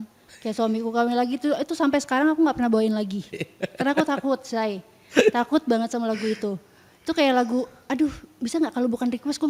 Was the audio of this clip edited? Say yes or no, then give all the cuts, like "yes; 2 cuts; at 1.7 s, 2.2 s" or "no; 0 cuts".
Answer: no; 0 cuts